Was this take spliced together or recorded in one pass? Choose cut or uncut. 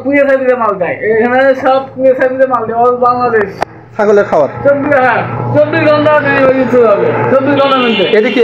uncut